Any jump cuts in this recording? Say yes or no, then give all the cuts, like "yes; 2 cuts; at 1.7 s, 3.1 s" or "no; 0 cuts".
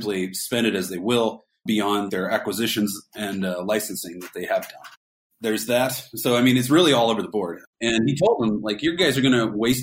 yes; 1 cut; at 7.6 s